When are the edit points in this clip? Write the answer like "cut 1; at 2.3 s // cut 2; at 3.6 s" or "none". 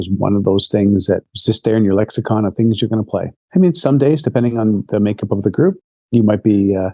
cut 1; at 1.3 s // cut 2; at 3.4 s